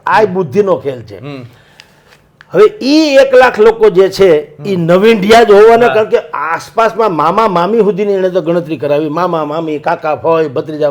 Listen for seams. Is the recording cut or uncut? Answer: uncut